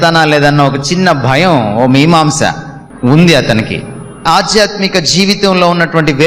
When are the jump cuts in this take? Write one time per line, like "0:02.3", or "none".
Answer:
0:04.2